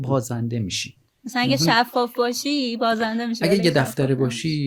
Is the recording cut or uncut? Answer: uncut